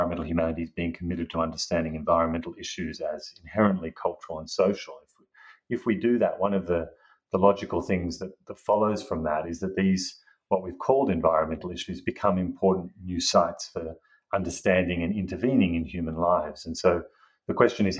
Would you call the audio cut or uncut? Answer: uncut